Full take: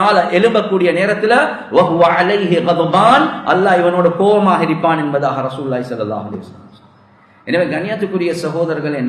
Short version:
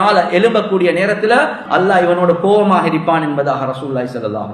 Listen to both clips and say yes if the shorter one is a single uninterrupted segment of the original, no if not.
no